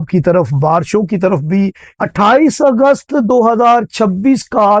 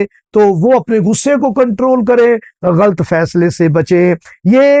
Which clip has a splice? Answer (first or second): first